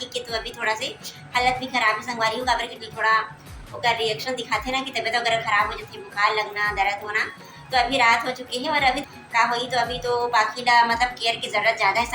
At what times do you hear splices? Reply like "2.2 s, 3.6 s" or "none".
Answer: 2.8 s, 9.0 s